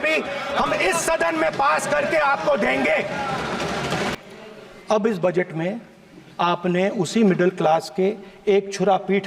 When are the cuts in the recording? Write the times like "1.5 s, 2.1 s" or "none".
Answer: 4.1 s